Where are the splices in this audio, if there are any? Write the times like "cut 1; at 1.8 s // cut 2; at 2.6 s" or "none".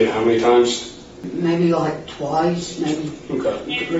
cut 1; at 1.3 s

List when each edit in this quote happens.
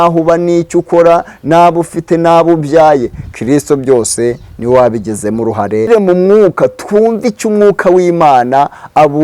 cut 1; at 5.9 s

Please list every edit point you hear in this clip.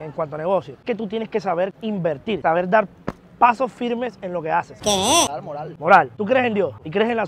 cut 1; at 5.3 s

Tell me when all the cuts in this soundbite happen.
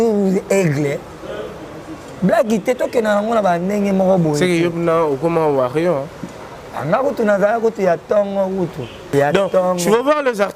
cut 1; at 9.1 s

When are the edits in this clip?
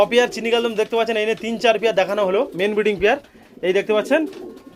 none

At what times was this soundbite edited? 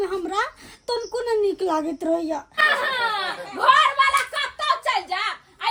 none

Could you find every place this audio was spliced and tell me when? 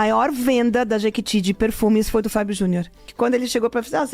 cut 1; at 3.1 s

